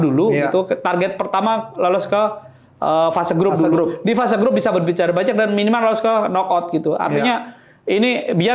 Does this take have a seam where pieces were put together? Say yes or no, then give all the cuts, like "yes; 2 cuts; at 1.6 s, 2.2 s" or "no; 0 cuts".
no; 0 cuts